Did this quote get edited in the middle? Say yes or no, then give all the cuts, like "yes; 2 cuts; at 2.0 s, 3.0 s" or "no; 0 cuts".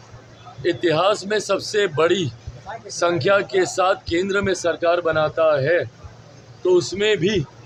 no; 0 cuts